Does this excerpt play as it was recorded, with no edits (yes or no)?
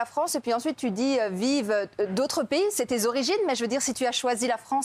yes